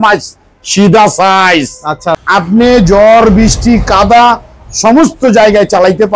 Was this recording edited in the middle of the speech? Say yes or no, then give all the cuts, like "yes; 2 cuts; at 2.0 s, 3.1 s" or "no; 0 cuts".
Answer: yes; 1 cut; at 2.0 s